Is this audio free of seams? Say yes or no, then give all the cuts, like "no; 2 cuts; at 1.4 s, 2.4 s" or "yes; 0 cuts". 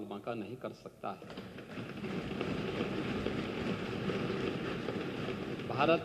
yes; 0 cuts